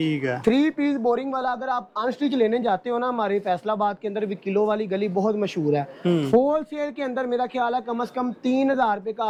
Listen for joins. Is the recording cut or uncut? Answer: uncut